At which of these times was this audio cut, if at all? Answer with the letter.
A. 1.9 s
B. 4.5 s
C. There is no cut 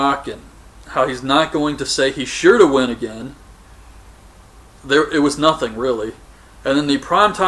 B